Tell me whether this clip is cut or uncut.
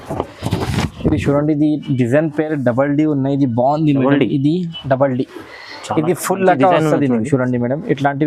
uncut